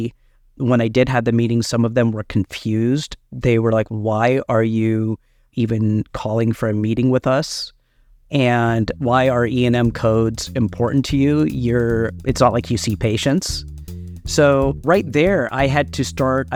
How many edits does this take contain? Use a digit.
0